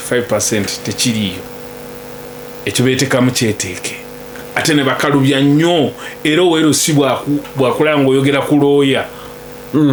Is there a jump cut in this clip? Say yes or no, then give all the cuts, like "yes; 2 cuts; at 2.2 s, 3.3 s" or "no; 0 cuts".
no; 0 cuts